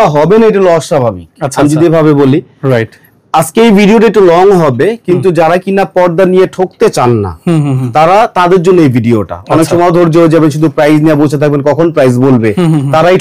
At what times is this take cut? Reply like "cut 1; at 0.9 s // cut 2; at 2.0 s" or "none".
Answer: none